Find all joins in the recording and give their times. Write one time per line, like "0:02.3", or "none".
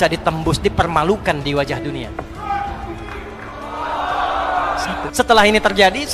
0:04.9